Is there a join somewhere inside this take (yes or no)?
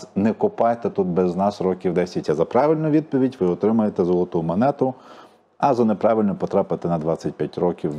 yes